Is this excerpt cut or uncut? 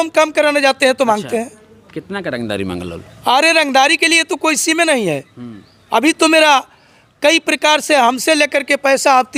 uncut